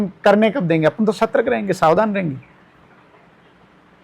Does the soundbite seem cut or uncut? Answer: uncut